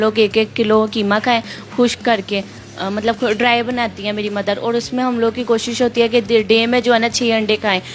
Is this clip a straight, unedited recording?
yes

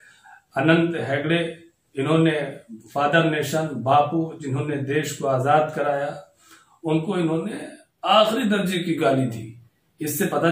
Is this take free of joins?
yes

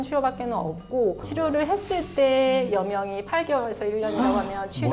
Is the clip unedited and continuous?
no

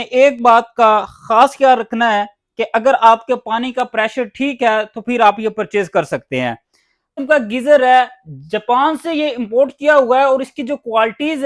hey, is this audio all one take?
no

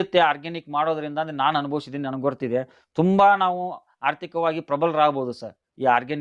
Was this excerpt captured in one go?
yes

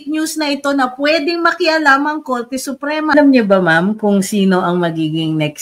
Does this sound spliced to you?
yes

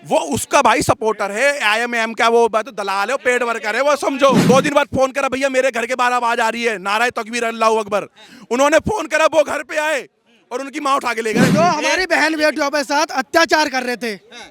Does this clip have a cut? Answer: yes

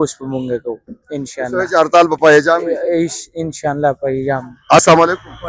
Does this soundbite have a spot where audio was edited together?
no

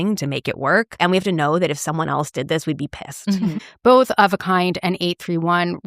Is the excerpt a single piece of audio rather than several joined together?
no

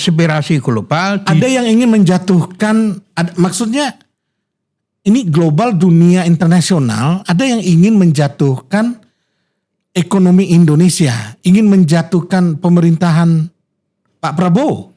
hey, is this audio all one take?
yes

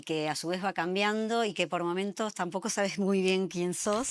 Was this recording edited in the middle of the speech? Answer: no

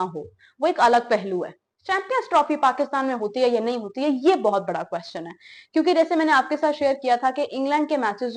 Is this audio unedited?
yes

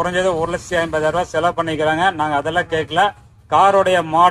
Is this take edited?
no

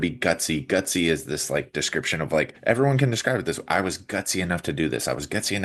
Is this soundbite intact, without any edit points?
no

